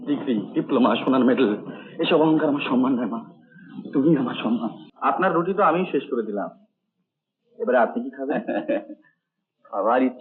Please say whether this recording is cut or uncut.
cut